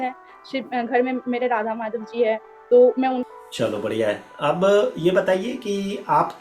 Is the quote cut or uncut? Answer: cut